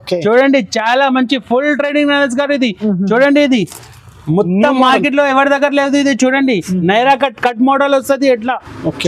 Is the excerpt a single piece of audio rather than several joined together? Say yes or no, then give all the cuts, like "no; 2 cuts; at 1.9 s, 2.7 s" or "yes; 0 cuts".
yes; 0 cuts